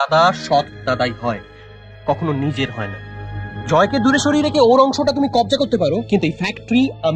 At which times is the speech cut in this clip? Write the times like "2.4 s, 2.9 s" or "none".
none